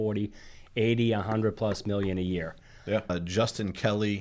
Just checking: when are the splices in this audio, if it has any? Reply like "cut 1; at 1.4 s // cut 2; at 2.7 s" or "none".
cut 1; at 3.1 s